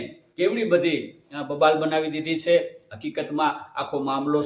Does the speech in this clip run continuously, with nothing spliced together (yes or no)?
yes